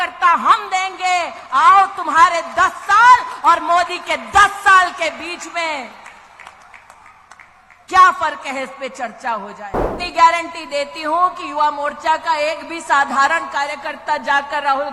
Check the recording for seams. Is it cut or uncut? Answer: cut